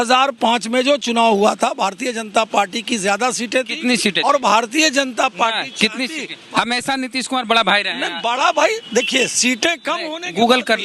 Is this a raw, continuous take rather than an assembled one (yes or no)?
yes